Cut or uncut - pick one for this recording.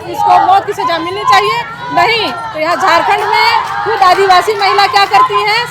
uncut